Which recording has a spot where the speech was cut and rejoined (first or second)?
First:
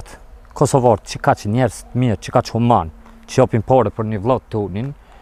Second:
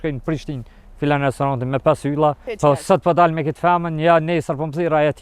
second